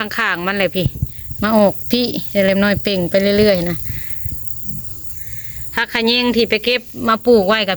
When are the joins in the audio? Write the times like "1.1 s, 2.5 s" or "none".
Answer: 4.9 s

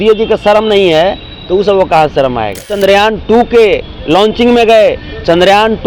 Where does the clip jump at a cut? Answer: 2.7 s

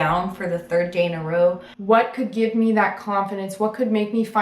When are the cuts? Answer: 1.7 s

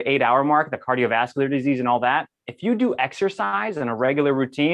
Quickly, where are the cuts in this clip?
none

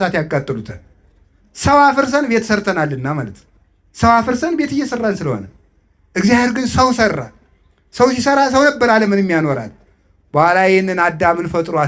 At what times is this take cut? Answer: none

